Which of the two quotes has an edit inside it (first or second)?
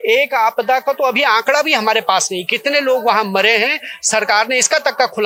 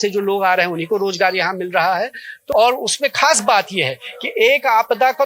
second